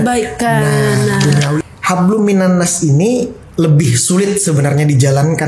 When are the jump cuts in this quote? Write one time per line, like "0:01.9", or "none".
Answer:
0:01.6